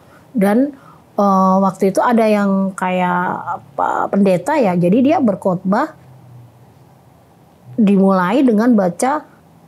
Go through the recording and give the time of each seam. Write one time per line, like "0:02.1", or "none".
none